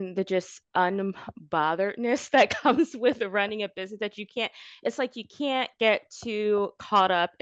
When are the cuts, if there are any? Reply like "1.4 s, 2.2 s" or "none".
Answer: none